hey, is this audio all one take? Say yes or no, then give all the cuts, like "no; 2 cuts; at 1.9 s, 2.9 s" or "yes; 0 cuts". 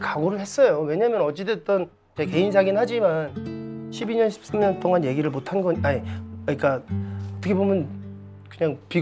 yes; 0 cuts